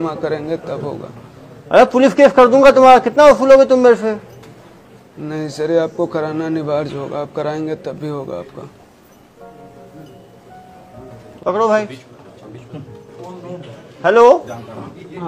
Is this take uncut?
no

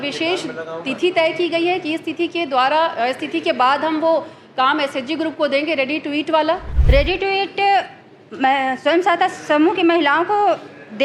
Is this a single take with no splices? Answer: no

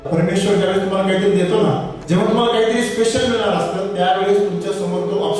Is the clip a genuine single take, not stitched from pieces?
no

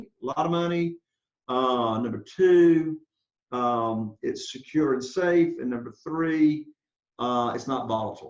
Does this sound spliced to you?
no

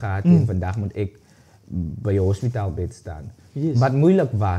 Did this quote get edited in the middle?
no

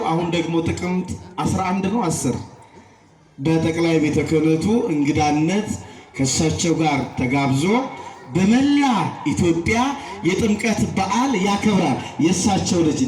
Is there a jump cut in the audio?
no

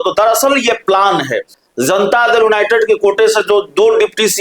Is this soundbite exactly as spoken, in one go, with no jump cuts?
no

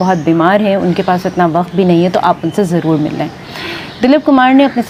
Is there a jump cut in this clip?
no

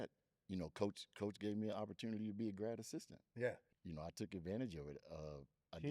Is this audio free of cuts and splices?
no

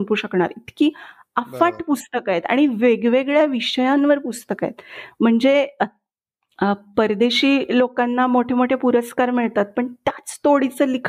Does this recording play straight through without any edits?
yes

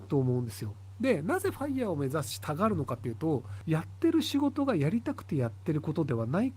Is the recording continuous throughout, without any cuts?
no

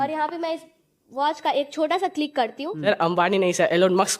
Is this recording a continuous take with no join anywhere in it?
no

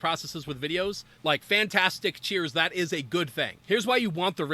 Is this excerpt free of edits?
no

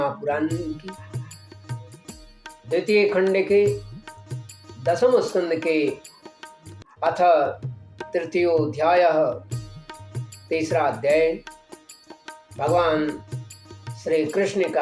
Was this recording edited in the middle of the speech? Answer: yes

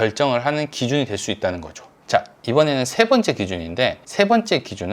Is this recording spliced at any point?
yes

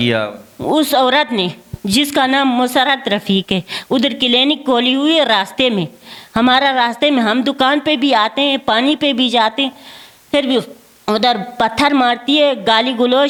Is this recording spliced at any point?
no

